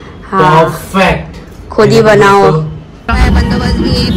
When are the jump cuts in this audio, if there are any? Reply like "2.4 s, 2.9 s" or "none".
3.1 s